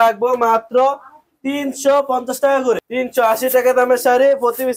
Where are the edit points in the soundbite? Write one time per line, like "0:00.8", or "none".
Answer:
0:02.8